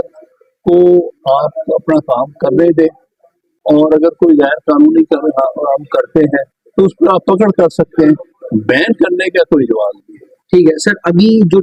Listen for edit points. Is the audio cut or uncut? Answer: uncut